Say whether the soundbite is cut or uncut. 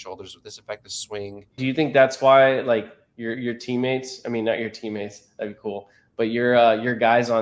cut